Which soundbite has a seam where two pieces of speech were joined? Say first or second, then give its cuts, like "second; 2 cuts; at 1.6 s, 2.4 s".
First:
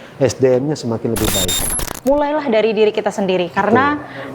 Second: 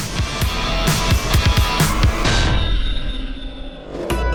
first; 1 cut; at 1.8 s